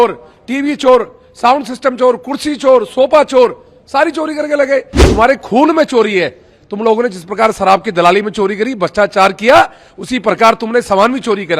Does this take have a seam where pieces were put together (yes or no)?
yes